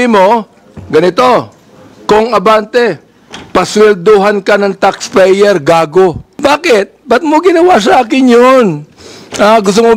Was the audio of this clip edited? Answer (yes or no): yes